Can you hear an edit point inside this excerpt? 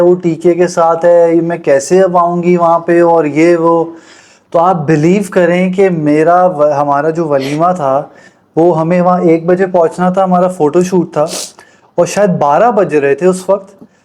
no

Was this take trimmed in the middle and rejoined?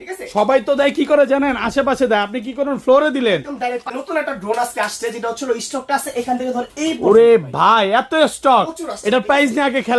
yes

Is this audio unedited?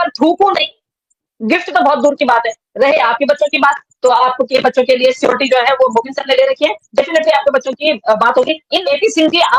yes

